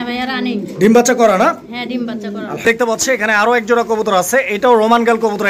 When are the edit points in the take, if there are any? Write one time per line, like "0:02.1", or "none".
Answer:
0:02.6